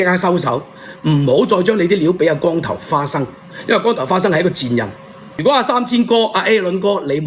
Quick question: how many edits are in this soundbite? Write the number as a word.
one